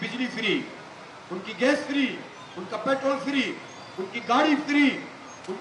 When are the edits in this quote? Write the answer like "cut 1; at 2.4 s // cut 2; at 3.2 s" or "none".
none